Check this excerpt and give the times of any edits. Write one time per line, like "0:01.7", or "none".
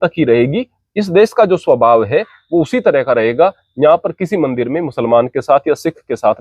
none